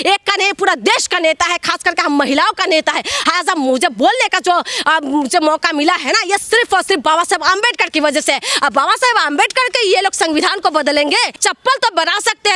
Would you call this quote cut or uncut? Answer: cut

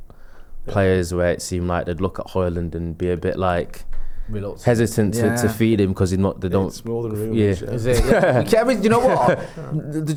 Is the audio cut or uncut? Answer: uncut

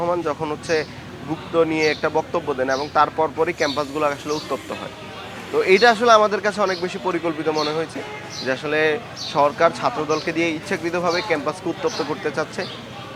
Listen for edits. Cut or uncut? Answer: uncut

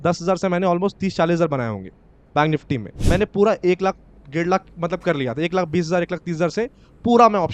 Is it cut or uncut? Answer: cut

